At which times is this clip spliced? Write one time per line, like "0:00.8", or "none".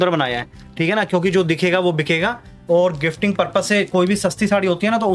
none